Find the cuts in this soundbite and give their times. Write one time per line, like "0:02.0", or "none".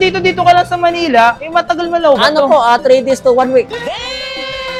none